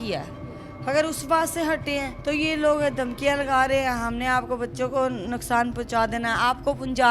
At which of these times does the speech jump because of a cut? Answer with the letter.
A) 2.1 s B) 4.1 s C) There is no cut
A